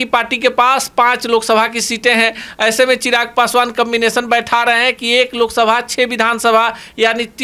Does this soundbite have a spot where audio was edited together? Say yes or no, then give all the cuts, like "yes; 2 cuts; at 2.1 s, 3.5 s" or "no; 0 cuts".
no; 0 cuts